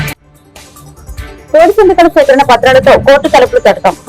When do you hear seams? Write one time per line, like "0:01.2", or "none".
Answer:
0:01.4